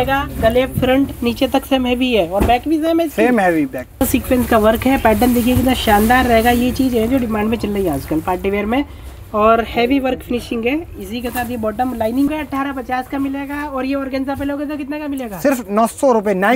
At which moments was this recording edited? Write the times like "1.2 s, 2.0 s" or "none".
4.0 s, 12.3 s